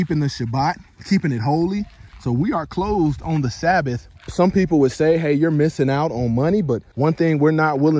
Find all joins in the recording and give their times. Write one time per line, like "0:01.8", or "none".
0:04.2
0:06.9